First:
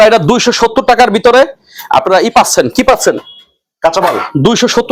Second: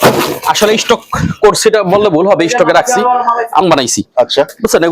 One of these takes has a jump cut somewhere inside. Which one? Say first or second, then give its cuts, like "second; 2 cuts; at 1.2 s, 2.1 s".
second; 1 cut; at 3.6 s